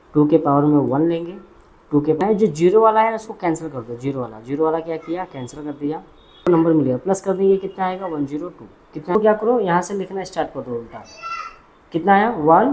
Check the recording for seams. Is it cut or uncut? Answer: cut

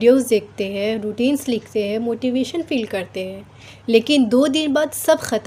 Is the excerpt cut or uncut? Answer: uncut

